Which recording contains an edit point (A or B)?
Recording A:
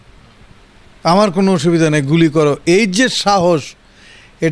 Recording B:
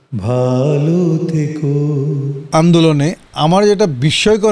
B